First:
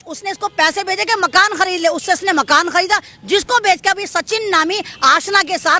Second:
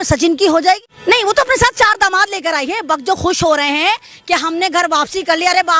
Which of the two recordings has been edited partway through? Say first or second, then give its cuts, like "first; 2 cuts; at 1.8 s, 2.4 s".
second; 1 cut; at 0.9 s